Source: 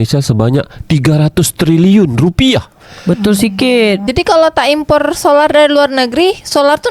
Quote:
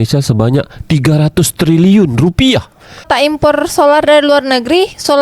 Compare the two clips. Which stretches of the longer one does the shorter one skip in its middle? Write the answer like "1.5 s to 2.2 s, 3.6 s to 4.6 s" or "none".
3.0 s to 4.5 s